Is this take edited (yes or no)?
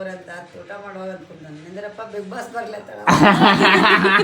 no